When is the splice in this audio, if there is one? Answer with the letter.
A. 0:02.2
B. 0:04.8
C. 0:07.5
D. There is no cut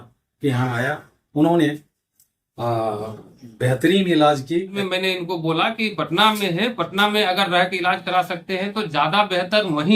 B